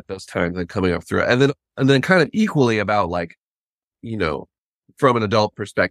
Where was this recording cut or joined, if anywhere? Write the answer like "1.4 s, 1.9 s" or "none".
none